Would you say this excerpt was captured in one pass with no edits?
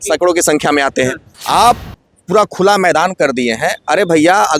no; 1 cut; at 1.3 s

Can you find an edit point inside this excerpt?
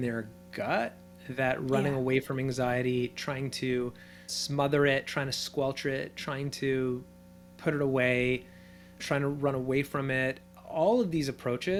no; 0 cuts

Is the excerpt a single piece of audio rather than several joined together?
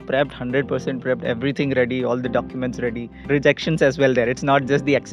no; 1 cut; at 3.1 s

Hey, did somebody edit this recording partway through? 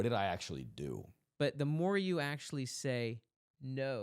yes; 1 cut; at 1.2 s

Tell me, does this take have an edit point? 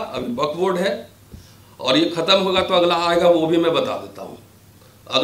no; 0 cuts

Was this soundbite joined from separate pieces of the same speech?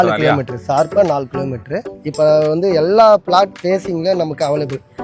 yes; 1 cut; at 2.0 s

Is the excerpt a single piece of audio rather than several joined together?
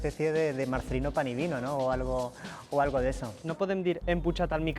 no; 1 cut; at 3.4 s

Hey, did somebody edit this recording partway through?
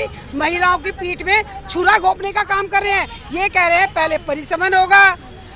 no; 0 cuts

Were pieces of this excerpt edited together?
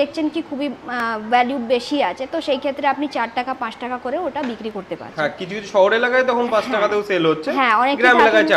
no; 0 cuts

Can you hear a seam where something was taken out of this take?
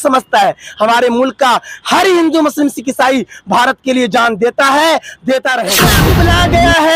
yes; 1 cut; at 6.0 s

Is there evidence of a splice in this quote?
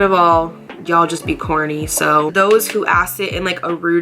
yes; 1 cut; at 2.3 s

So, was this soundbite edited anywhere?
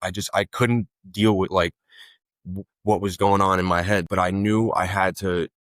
yes; 1 cut; at 4.1 s

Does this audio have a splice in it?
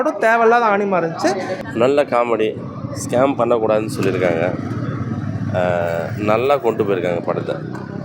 yes; 1 cut; at 1.6 s

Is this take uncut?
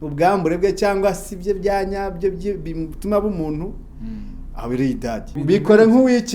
no; 1 cut; at 5.4 s

